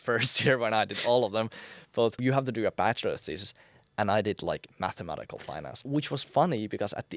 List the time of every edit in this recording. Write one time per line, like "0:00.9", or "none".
0:02.2
0:05.8